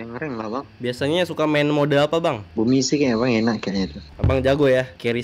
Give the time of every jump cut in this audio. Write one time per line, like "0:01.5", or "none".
none

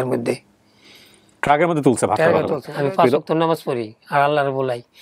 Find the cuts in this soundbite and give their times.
0:02.6

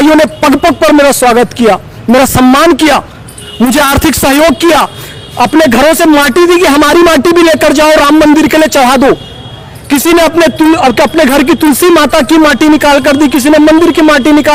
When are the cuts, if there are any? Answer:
none

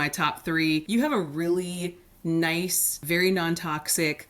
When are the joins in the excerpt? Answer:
0:00.9
0:03.0

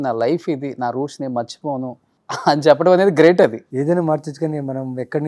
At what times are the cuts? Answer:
0:02.1
0:03.7

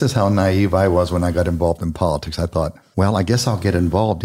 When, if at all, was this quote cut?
0:02.8

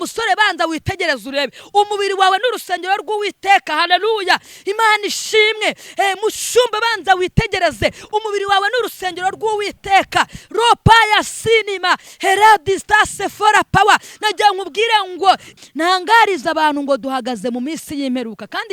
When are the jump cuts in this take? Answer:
0:15.5

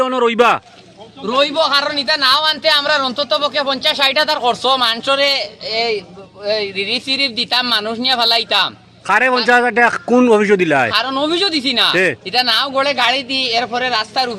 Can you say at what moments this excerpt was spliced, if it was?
none

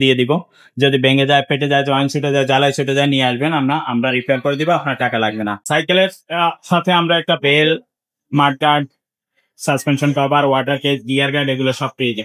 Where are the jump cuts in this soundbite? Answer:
0:05.6

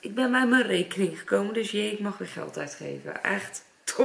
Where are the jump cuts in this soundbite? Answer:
none

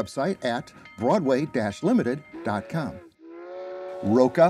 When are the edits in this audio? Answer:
0:03.3

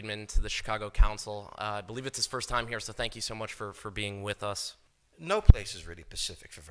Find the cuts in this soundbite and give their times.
0:02.6

